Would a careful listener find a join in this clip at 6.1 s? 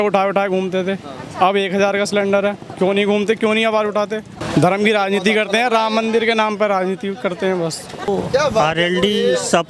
no; 2 cuts; at 4.3 s, 8.1 s

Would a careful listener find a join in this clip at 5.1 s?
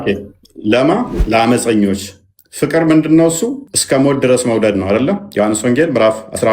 no; 2 cuts; at 1.2 s, 3.7 s

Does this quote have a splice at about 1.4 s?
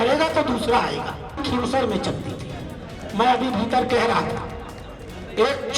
yes; 1 cut; at 1.4 s

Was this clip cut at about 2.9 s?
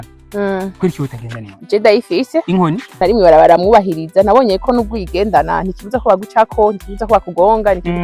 yes; 1 cut; at 2.9 s

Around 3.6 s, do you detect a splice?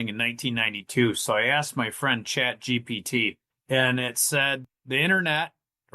yes; 2 cuts; at 3.6 s, 4.7 s

